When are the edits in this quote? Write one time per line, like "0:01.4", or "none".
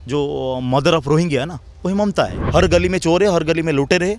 0:02.4